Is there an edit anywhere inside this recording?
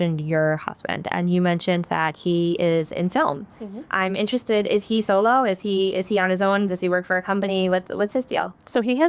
no; 0 cuts

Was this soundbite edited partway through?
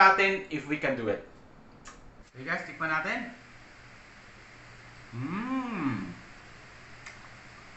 yes; 1 cut; at 2.1 s

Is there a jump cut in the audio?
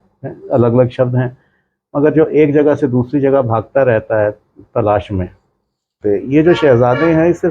yes; 1 cut; at 5.9 s

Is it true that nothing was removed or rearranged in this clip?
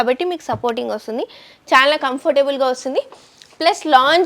yes; 0 cuts

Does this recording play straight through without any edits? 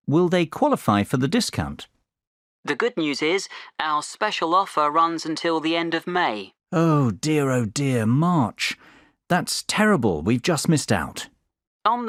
yes; 0 cuts

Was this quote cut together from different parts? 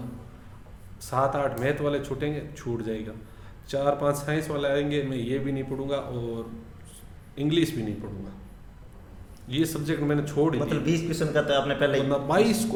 no; 0 cuts

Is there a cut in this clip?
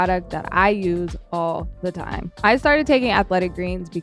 yes; 1 cut; at 2.3 s

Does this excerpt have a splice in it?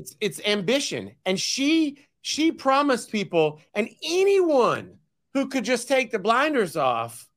no; 0 cuts

